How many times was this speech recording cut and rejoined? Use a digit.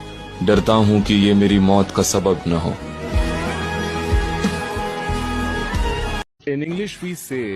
1